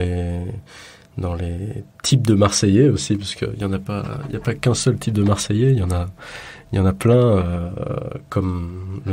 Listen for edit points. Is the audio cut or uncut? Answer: uncut